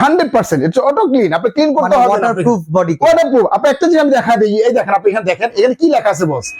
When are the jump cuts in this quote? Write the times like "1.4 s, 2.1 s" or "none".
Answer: none